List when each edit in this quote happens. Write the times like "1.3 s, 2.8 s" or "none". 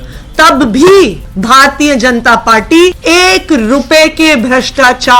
1.3 s, 3.0 s